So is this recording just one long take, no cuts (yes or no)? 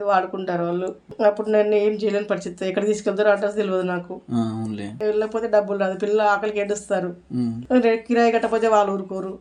yes